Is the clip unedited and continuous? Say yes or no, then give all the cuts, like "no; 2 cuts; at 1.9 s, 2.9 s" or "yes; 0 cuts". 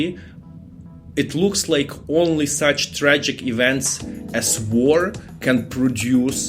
yes; 0 cuts